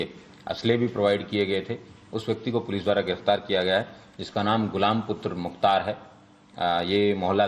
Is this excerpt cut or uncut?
cut